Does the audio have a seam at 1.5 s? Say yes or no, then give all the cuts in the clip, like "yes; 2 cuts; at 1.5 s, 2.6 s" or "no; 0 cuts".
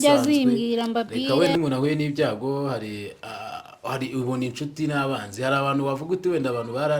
yes; 1 cut; at 1.5 s